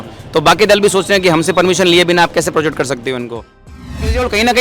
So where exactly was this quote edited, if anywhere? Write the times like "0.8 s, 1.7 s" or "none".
3.6 s